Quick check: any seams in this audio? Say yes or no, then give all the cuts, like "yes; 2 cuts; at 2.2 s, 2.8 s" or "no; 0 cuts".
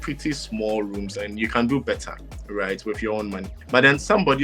no; 0 cuts